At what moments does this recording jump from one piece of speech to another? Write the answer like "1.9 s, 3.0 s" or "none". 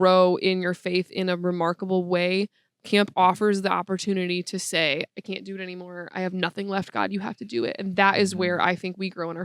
none